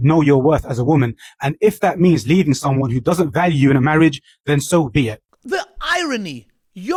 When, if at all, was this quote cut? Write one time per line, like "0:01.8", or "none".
none